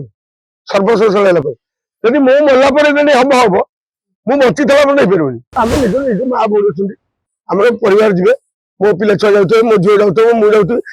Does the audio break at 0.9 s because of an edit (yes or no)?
no